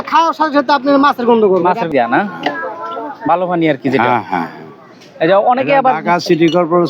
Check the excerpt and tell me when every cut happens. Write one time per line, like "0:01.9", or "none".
0:01.9